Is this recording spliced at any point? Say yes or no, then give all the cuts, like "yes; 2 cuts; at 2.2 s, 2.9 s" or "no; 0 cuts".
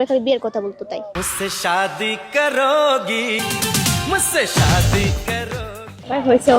yes; 1 cut; at 3.4 s